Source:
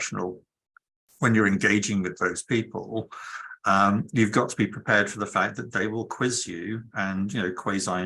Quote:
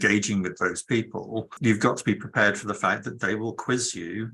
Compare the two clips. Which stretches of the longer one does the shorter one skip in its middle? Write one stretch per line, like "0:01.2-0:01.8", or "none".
0:03.2-0:04.1